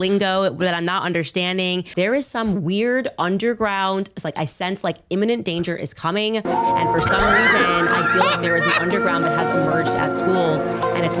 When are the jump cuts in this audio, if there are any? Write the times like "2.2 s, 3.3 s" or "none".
1.9 s